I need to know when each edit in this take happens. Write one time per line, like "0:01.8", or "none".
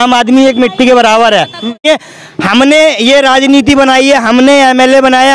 0:01.9

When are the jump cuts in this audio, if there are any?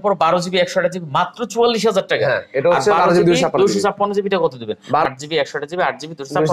0:05.1

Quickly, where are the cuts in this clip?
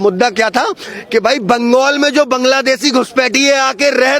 none

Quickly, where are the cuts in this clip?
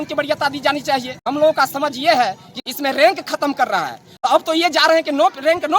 0:01.3
0:02.6
0:04.0

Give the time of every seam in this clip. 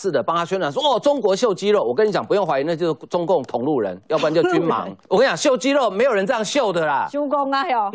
0:04.9

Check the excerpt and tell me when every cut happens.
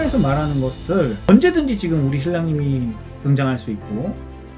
0:01.3

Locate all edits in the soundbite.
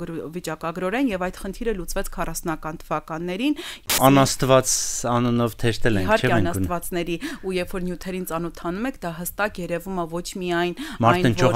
0:03.9

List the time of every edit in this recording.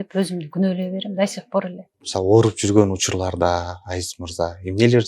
0:02.1

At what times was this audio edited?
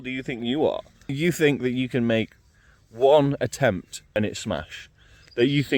0:01.2
0:04.1

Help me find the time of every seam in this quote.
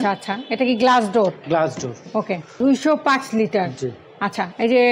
0:02.5

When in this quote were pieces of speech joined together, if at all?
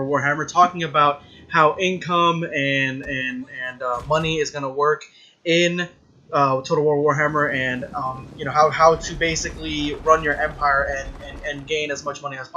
0:07.0

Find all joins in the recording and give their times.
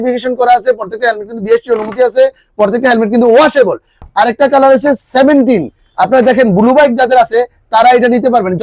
0:03.9

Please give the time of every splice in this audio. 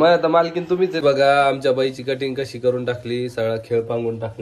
0:00.9

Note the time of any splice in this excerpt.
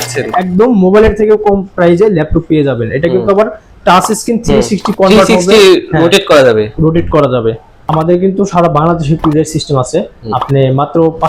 0:07.8

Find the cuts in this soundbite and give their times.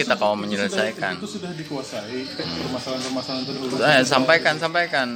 none

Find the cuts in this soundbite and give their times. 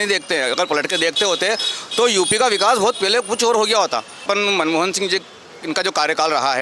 0:04.2

